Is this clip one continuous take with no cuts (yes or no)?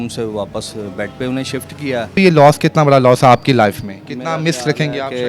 no